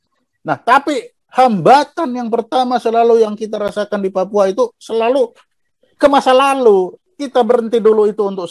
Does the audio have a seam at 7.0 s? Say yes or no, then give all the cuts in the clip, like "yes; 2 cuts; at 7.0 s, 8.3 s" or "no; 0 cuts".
yes; 1 cut; at 7.0 s